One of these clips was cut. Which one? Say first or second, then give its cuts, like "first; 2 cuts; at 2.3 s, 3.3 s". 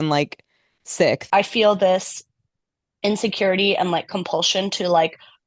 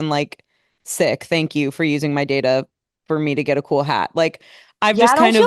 first; 1 cut; at 1.2 s